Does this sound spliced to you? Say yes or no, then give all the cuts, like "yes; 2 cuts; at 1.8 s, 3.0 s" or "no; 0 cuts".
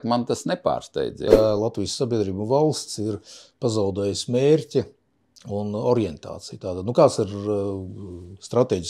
yes; 1 cut; at 1.2 s